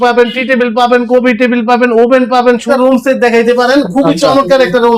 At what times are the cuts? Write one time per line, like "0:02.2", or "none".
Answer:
0:02.6